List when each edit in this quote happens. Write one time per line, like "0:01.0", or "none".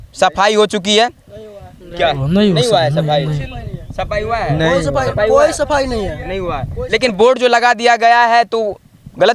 none